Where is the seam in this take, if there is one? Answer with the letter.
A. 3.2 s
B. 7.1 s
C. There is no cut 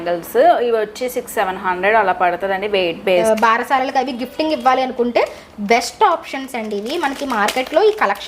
A